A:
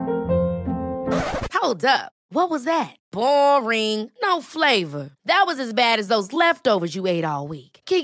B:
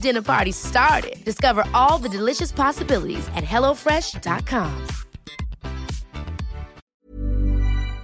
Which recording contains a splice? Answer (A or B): B